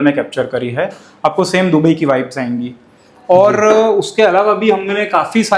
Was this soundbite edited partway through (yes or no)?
no